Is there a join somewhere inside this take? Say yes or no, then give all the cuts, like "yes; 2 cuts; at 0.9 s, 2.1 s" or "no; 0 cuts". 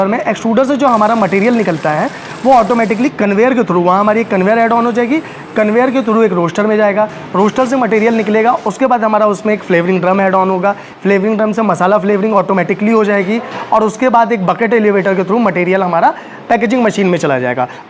no; 0 cuts